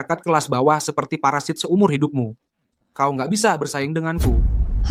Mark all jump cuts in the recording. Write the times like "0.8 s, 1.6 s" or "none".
none